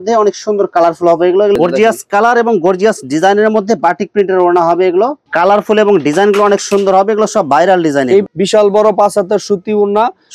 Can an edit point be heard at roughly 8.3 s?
yes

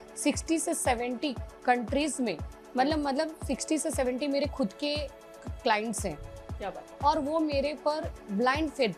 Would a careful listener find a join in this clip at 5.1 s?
no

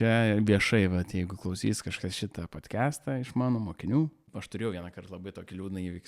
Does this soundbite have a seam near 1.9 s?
no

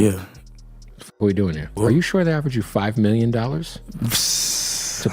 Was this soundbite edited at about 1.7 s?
yes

